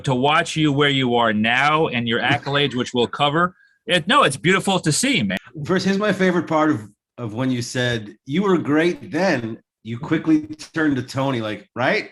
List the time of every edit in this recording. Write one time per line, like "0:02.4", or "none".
0:05.4